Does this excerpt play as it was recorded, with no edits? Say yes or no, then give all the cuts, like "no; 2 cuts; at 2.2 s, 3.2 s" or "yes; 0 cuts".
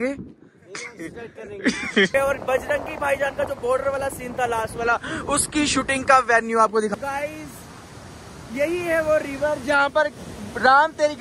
no; 2 cuts; at 2.1 s, 6.9 s